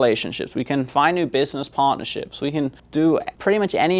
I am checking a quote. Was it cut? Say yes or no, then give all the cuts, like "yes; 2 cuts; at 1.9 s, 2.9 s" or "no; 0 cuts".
yes; 1 cut; at 3.1 s